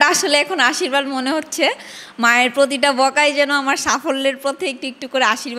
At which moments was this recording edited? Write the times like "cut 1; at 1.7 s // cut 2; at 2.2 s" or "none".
none